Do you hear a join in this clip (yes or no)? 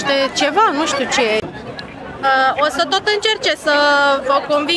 yes